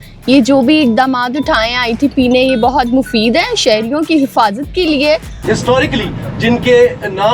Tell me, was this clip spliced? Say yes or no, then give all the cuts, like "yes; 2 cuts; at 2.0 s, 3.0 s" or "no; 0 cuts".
yes; 1 cut; at 5.3 s